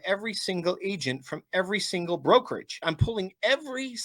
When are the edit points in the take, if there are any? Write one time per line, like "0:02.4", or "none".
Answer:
0:02.7